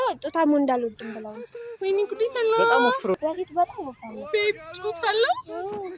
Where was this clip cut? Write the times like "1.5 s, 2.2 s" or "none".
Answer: 3.2 s